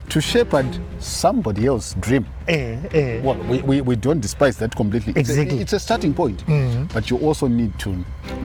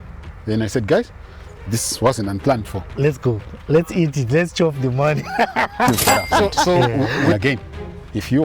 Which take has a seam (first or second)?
second